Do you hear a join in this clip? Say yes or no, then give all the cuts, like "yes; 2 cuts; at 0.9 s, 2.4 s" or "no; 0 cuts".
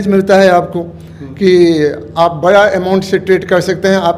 no; 0 cuts